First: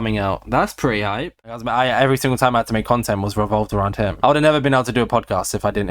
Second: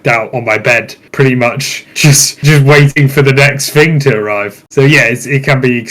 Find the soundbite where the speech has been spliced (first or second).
first